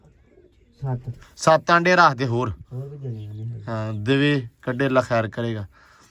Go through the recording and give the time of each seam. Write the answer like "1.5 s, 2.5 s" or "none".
none